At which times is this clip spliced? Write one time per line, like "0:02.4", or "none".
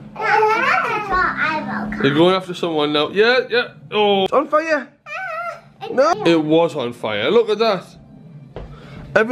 0:04.3
0:06.1